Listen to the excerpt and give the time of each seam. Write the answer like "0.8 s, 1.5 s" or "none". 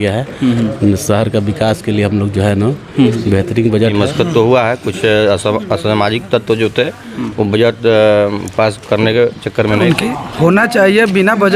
3.9 s, 9.8 s